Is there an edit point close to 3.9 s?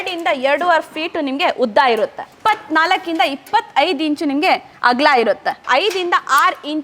no; 2 cuts; at 2.3 s, 5.6 s

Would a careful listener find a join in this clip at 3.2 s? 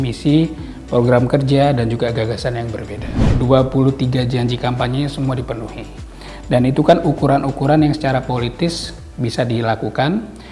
yes; 1 cut; at 3.2 s

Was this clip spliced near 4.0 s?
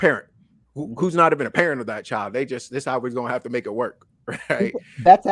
no; 0 cuts

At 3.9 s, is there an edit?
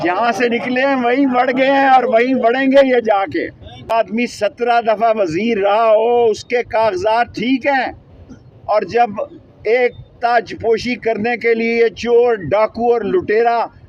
yes; 1 cut; at 3.9 s

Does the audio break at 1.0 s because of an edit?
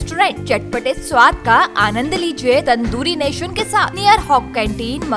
no; 2 cuts; at 2.6 s, 3.9 s

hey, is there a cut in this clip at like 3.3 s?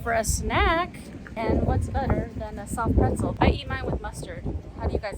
yes; 2 cuts; at 1.3 s, 3.3 s

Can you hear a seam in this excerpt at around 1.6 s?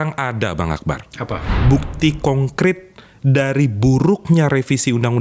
yes; 1 cut; at 1.6 s

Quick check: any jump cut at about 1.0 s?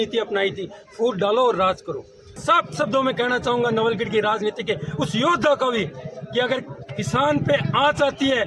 no; 1 cut; at 2.4 s

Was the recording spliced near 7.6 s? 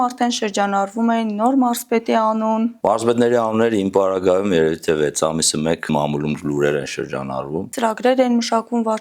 yes; 3 cuts; at 2.8 s, 5.9 s, 7.6 s

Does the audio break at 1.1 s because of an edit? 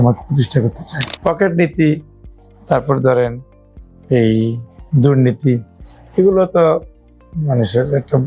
yes; 1 cut; at 1.1 s

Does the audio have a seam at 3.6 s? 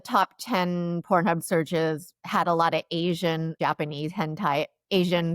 yes; 1 cut; at 3.6 s

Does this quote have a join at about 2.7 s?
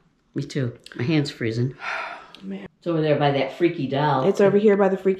yes; 1 cut; at 2.7 s

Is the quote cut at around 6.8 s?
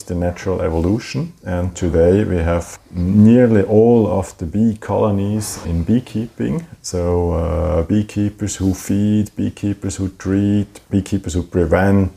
no; 1 cut; at 10.7 s

